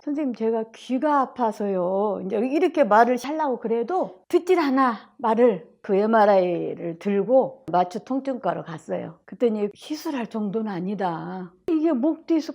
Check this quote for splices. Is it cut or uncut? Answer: cut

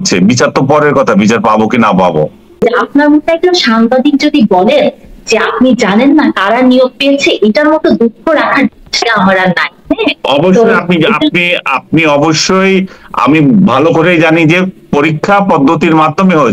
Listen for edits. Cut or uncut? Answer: cut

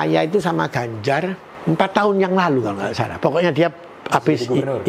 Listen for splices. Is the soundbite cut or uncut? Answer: cut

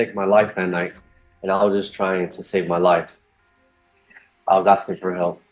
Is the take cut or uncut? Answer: uncut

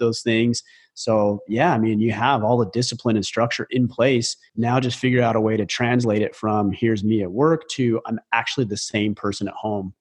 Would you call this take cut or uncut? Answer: cut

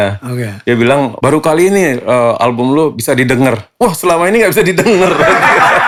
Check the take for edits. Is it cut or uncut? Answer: uncut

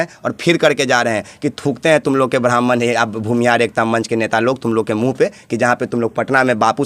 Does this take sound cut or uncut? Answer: uncut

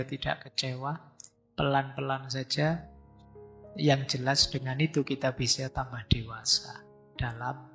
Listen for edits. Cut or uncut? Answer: uncut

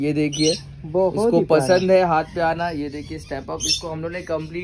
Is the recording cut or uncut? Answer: uncut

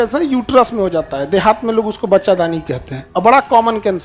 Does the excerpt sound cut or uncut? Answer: uncut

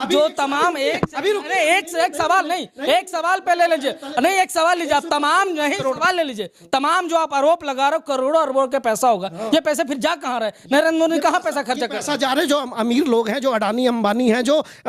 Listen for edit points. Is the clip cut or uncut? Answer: uncut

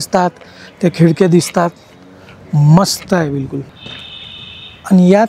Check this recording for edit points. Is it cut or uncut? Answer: cut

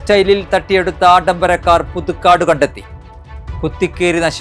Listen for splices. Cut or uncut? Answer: uncut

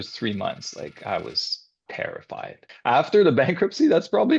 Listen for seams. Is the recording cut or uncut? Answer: cut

